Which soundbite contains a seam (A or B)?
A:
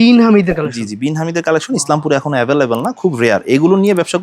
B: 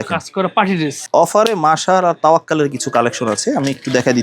B